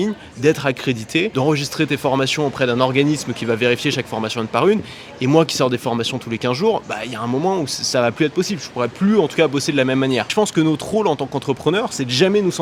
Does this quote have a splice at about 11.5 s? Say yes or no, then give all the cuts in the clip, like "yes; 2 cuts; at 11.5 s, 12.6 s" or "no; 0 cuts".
no; 1 cut; at 10.3 s